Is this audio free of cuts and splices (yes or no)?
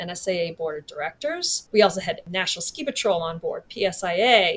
no